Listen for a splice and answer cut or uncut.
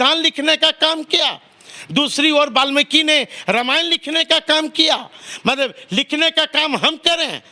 uncut